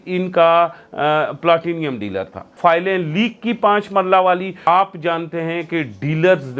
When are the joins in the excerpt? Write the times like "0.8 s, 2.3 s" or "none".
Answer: 2.5 s, 4.7 s